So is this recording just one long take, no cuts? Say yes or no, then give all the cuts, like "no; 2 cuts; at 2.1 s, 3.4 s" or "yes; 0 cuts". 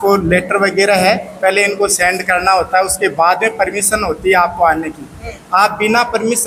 yes; 0 cuts